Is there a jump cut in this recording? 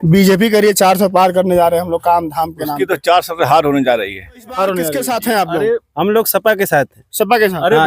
yes; 1 cut; at 5.0 s

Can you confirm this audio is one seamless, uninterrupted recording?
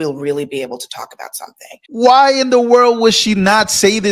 no; 1 cut; at 2.0 s

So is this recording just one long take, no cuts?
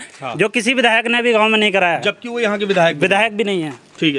yes; 0 cuts

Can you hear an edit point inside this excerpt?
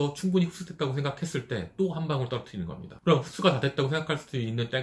no; 0 cuts

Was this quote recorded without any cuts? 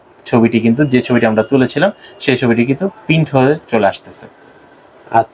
yes; 0 cuts

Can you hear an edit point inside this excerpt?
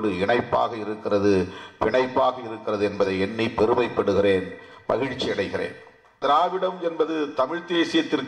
yes; 1 cut; at 6.2 s

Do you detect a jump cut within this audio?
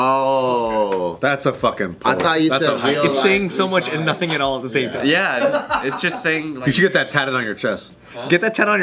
no; 0 cuts

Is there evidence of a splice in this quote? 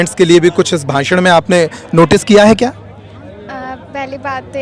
no; 0 cuts

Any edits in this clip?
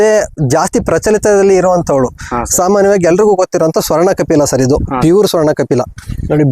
no; 0 cuts

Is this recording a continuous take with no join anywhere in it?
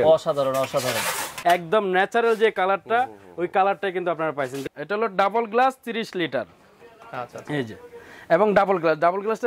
no; 2 cuts; at 1.2 s, 4.6 s

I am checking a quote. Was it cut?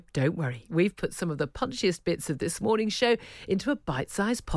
no; 0 cuts

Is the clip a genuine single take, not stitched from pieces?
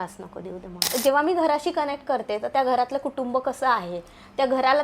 no; 1 cut; at 0.9 s

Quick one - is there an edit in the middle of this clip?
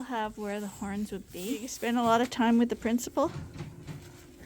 yes; 1 cut; at 1.7 s

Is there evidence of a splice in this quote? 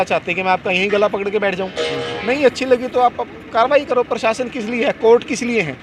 no; 0 cuts

